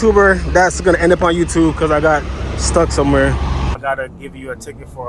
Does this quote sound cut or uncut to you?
cut